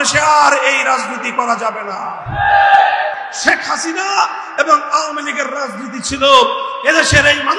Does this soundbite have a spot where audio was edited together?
yes; 1 cut; at 3.3 s

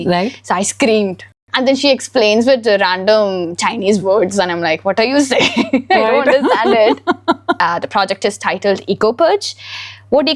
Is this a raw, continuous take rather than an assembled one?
no; 2 cuts; at 1.4 s, 7.6 s

